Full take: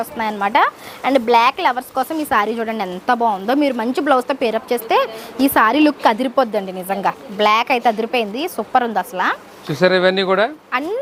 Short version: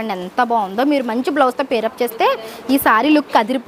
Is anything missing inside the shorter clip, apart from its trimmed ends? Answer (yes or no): no